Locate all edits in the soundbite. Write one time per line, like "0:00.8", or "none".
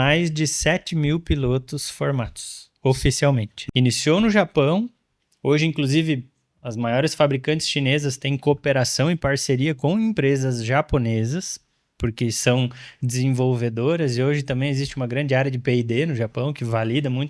0:03.5